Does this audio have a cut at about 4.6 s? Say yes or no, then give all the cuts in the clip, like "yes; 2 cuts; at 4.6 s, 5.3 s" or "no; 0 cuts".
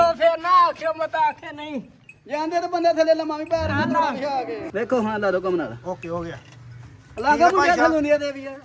yes; 1 cut; at 4.6 s